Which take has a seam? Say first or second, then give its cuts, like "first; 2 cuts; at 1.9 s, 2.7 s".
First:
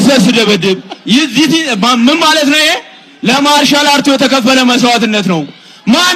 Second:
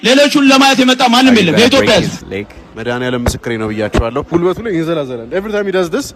second; 2 cuts; at 2.2 s, 4.3 s